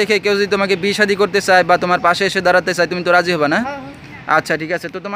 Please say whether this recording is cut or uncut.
uncut